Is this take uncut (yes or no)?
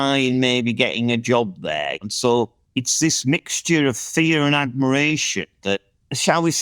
yes